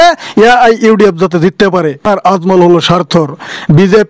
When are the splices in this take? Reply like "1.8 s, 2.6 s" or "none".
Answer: 2.1 s